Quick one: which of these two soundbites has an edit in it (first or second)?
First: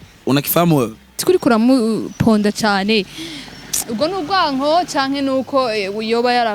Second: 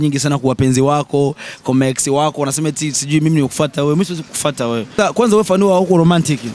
first